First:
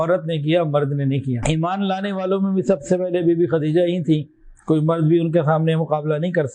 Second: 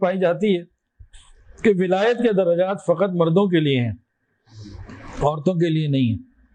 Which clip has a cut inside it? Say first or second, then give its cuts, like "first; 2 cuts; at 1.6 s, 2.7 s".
first; 1 cut; at 1.4 s